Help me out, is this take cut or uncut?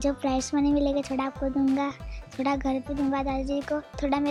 uncut